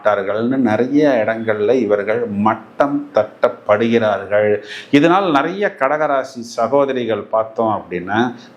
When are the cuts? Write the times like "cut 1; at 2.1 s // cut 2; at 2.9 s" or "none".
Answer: none

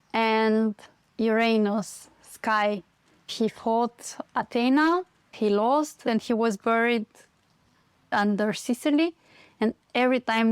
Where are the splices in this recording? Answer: cut 1; at 5.2 s // cut 2; at 6.0 s // cut 3; at 8.1 s

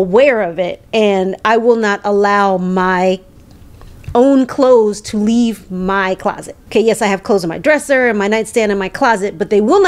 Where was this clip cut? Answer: cut 1; at 6.5 s

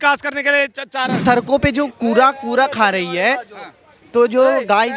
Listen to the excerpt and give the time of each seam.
cut 1; at 1.2 s

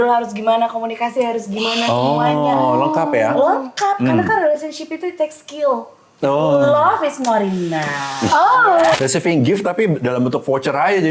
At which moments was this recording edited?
cut 1; at 9.0 s

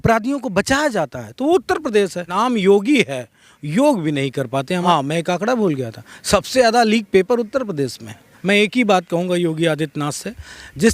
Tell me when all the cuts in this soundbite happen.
cut 1; at 2.3 s // cut 2; at 4.8 s // cut 3; at 8.3 s

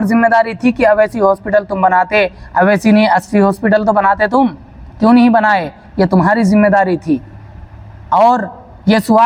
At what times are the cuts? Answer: none

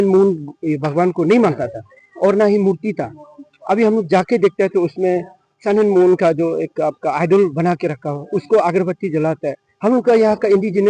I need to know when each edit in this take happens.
none

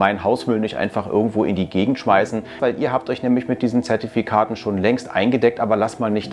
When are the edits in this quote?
cut 1; at 2.5 s

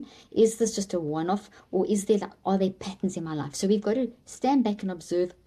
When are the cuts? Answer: none

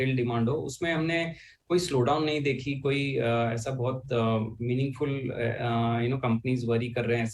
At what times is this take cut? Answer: cut 1; at 6.4 s

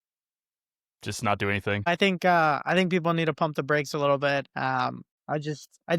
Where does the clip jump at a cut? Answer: cut 1; at 1.9 s

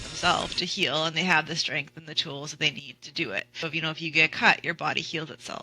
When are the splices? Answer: cut 1; at 3.6 s

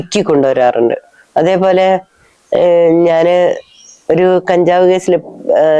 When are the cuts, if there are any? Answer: none

